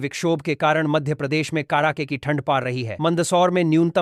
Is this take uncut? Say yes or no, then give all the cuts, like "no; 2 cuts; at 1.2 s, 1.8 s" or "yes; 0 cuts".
yes; 0 cuts